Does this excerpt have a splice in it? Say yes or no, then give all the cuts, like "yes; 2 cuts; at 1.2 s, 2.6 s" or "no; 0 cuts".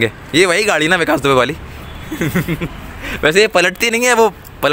no; 0 cuts